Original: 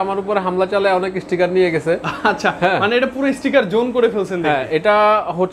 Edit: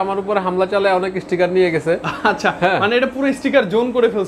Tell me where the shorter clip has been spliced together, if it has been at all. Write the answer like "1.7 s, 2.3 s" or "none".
none